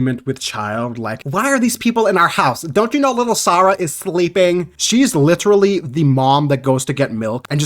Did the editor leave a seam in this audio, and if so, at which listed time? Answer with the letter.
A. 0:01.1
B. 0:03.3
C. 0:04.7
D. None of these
C